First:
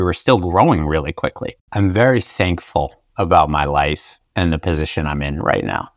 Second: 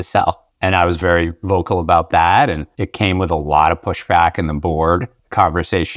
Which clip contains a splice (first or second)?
first